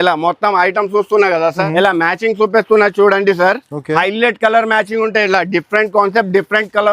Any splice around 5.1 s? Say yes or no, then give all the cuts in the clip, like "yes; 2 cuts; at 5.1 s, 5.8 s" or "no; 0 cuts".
no; 1 cut; at 1.6 s